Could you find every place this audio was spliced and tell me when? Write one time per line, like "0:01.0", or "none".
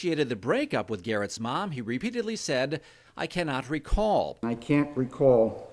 0:04.4